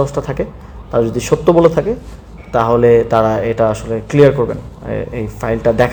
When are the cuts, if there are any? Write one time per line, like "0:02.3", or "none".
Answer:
none